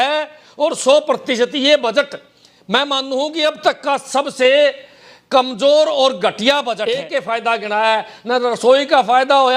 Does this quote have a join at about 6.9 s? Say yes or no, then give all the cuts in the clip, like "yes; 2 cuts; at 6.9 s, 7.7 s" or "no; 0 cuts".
yes; 1 cut; at 6.9 s